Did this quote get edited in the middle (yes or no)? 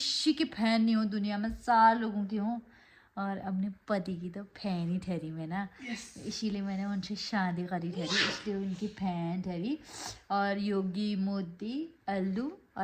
no